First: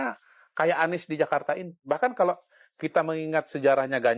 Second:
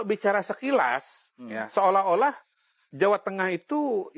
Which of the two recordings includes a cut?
first; 1 cut; at 1.8 s

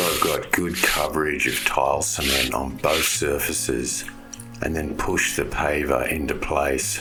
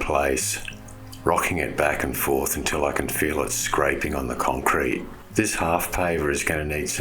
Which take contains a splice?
second; 1 cut; at 5.2 s

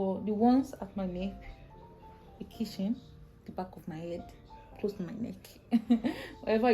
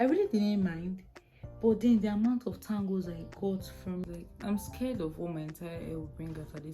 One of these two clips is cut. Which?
second; 1 cut; at 4.0 s

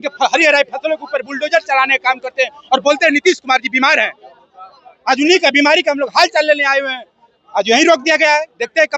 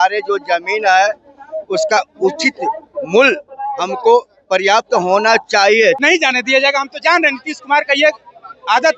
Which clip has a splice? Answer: second; 1 cut; at 6.0 s

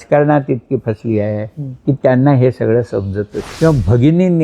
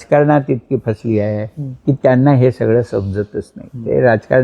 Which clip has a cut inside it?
first; 1 cut; at 3.4 s

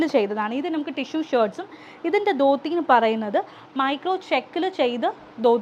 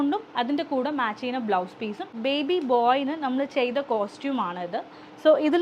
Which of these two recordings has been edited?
second; 1 cut; at 2.1 s

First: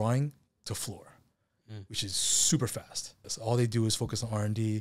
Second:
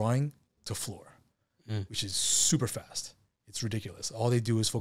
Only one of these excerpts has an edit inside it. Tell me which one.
first; 1 cut; at 3.2 s

